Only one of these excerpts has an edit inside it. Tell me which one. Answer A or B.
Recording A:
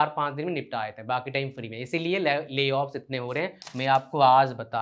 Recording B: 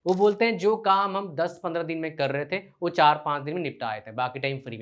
A